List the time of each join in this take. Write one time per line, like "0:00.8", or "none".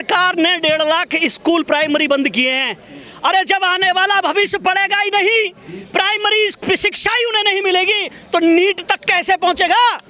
none

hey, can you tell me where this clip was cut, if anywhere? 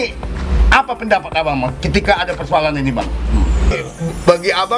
0:03.7

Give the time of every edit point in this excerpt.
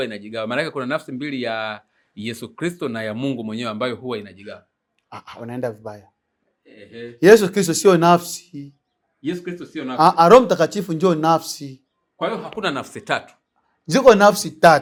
none

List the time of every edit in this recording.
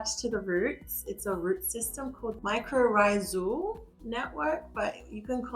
0:02.4

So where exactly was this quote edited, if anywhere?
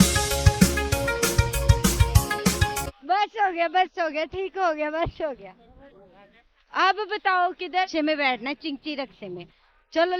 0:07.9

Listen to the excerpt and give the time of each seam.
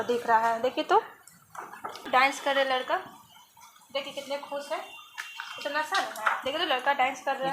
0:02.2

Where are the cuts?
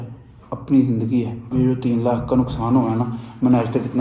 0:01.5

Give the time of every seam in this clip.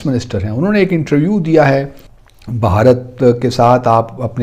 0:01.9

